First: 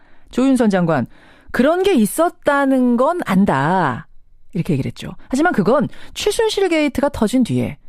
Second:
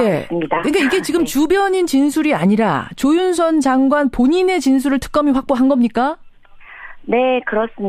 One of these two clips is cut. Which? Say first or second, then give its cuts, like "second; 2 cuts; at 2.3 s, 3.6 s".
second; 1 cut; at 1.7 s